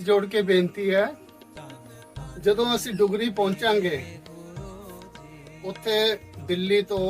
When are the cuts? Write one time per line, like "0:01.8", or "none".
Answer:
0:04.0
0:05.6